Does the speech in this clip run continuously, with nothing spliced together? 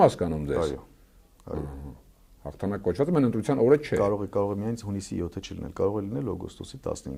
yes; 0 cuts

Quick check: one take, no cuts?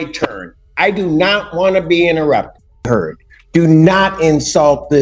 no; 1 cut; at 2.8 s

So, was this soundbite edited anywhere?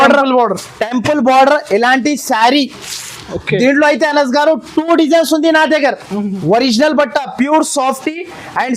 yes; 1 cut; at 6.4 s

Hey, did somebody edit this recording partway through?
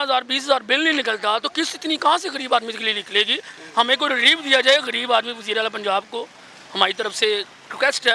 no; 0 cuts

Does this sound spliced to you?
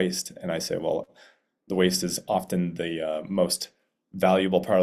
no; 0 cuts

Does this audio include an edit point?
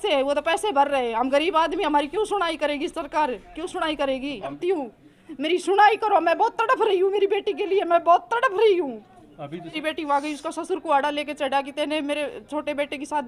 yes; 2 cuts; at 4.6 s, 9.8 s

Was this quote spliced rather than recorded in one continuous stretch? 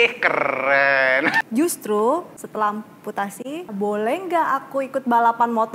yes; 3 cuts; at 1.4 s, 2.4 s, 3.7 s

